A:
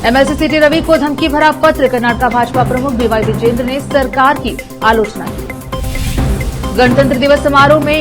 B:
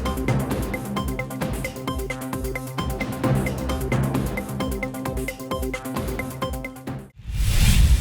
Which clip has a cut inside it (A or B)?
B